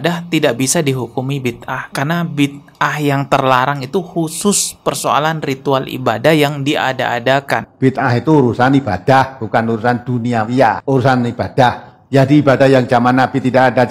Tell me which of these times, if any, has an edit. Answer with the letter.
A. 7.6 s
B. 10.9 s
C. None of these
A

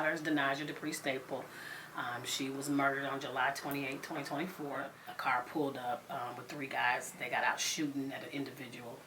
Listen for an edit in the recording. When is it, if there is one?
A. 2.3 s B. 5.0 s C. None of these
B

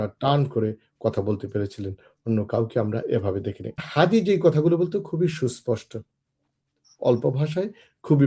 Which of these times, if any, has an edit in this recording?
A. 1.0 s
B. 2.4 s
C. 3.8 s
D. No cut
C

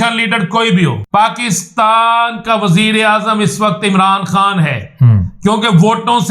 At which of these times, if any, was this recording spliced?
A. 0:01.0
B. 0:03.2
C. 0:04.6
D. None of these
A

